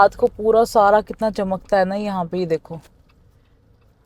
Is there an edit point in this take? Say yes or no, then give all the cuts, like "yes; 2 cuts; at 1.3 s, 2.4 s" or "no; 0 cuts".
no; 0 cuts